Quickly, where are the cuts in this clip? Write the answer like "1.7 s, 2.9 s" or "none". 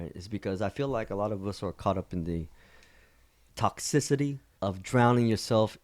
3.5 s, 4.5 s